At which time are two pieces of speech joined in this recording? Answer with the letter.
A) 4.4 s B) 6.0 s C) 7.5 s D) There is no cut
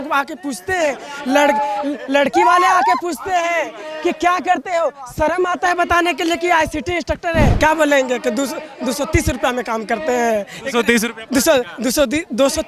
C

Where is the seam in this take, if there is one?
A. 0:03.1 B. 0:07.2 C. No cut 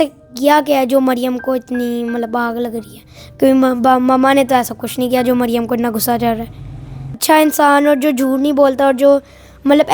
B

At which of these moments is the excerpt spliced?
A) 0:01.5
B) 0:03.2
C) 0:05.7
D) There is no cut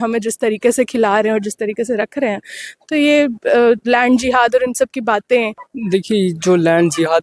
C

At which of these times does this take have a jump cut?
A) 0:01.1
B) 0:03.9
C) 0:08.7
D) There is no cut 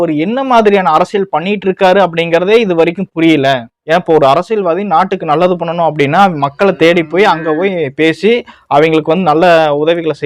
B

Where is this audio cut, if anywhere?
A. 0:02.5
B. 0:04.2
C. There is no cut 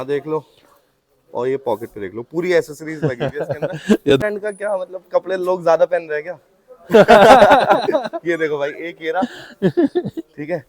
B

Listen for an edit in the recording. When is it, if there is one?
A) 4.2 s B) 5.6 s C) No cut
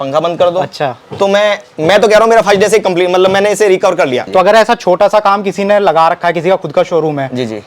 A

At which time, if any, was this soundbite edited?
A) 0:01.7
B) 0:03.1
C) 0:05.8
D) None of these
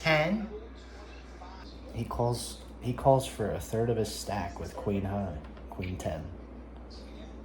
A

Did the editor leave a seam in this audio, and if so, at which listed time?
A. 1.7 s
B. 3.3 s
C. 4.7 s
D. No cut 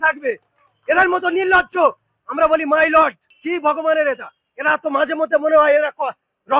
B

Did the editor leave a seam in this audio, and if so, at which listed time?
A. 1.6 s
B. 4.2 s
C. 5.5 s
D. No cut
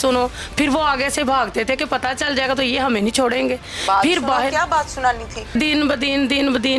C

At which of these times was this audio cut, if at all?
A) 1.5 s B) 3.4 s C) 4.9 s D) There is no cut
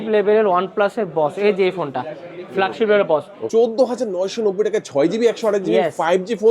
B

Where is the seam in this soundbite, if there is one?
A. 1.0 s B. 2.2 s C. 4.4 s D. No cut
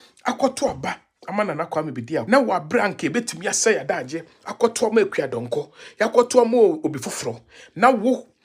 B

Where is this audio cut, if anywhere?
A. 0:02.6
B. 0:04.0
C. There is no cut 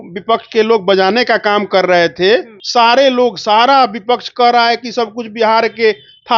A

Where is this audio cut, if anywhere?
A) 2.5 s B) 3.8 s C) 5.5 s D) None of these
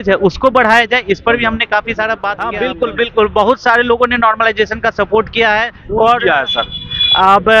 A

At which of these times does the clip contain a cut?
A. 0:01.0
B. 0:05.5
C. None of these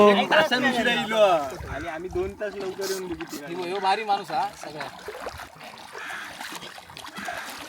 B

